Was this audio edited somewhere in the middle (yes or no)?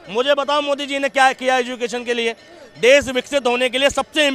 no